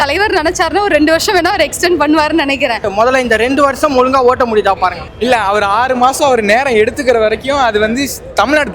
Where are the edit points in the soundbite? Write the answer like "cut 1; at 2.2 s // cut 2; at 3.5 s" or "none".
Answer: cut 1; at 2.8 s // cut 2; at 5.0 s